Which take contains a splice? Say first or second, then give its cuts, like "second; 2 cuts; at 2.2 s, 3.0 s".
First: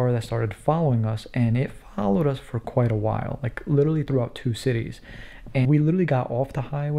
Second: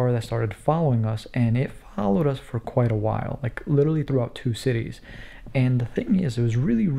first; 1 cut; at 5.7 s